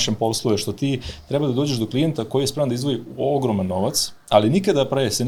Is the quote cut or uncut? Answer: uncut